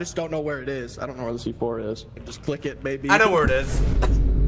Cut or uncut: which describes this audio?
cut